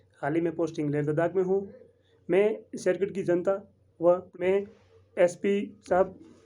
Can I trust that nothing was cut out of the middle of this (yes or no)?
no